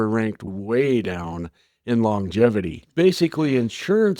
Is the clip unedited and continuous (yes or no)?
no